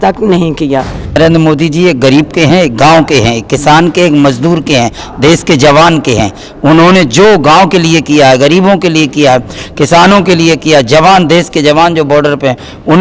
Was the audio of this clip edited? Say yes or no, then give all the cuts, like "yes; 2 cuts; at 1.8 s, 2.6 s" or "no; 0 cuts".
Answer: yes; 1 cut; at 1.2 s